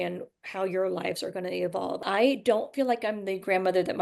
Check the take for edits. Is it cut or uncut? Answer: cut